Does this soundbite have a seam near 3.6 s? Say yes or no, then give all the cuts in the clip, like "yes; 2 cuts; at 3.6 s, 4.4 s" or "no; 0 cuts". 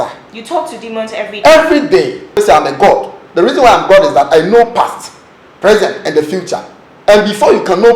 no; 1 cut; at 2.4 s